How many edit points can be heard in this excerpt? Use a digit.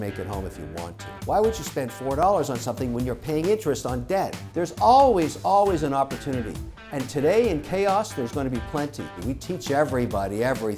3